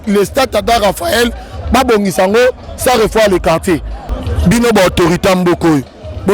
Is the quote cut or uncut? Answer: cut